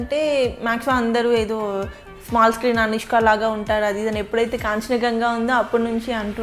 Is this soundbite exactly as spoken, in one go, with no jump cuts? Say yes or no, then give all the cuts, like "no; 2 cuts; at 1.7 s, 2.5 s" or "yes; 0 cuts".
yes; 0 cuts